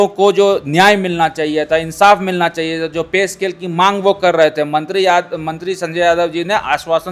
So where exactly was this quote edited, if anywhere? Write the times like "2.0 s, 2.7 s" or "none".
none